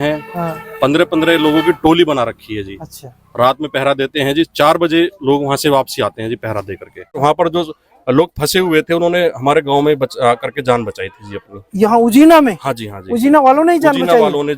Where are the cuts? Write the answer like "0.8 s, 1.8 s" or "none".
7.2 s